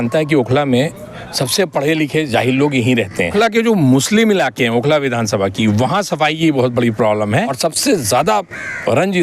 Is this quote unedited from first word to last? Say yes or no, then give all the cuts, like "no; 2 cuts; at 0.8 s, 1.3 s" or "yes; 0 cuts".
no; 2 cuts; at 3.3 s, 7.6 s